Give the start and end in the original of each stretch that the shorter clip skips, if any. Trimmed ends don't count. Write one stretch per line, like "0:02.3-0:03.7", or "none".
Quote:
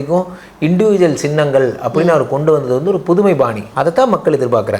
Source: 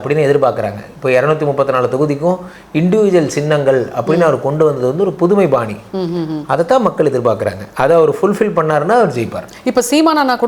0:05.8-0:06.4